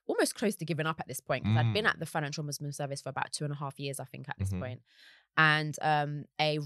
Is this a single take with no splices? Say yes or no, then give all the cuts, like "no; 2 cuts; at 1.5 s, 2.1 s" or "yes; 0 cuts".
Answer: yes; 0 cuts